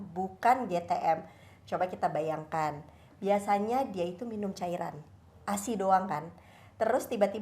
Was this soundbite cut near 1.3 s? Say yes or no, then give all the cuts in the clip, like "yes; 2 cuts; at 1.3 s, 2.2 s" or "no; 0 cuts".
no; 0 cuts